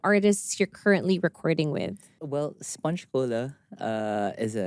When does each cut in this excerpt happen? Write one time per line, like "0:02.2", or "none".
0:02.1

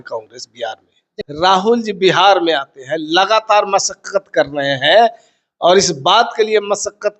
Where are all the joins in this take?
0:01.1

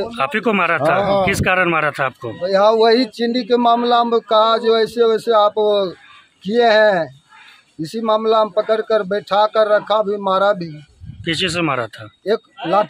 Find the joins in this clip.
none

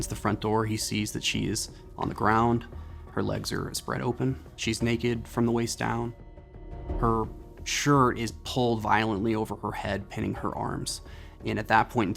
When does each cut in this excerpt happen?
none

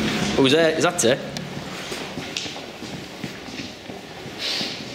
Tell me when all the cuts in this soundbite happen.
none

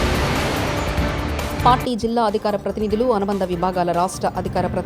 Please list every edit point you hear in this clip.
0:01.6

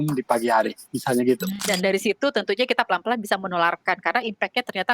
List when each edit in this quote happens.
0:01.5

